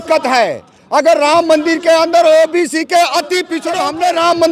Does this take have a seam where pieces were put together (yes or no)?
yes